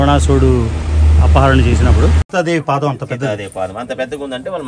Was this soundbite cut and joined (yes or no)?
yes